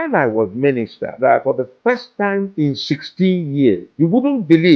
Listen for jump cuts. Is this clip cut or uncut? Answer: cut